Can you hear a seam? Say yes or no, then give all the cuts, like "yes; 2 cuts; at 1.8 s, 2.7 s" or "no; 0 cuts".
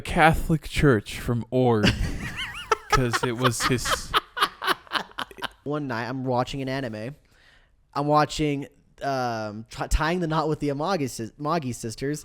yes; 1 cut; at 5.7 s